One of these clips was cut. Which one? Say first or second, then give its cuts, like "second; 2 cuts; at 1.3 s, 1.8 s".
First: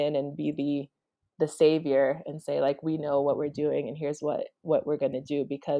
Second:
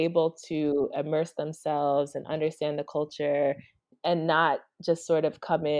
second; 1 cut; at 3.9 s